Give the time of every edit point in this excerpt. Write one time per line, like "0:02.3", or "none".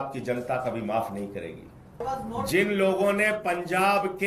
0:02.0